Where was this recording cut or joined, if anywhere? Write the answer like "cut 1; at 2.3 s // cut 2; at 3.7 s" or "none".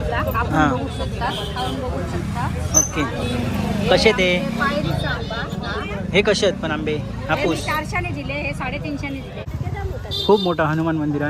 cut 1; at 9.4 s